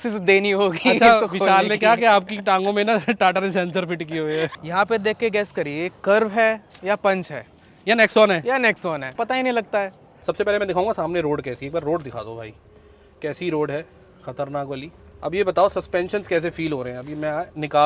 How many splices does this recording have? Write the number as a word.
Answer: three